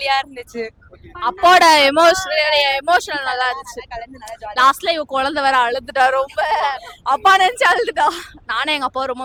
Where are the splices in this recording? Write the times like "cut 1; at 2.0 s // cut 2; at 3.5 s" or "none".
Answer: none

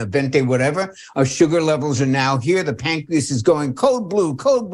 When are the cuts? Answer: none

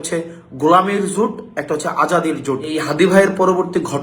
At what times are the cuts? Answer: cut 1; at 2.7 s

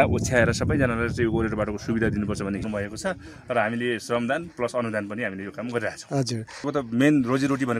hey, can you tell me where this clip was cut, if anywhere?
cut 1; at 2.6 s // cut 2; at 6.7 s

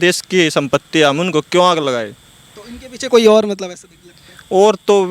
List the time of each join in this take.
none

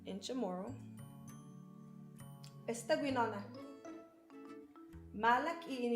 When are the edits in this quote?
cut 1; at 0.8 s // cut 2; at 2.3 s

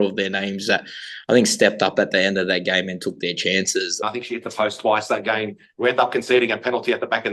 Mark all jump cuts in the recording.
cut 1; at 4.0 s

